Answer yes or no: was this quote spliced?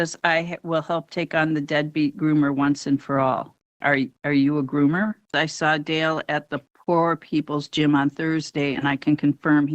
yes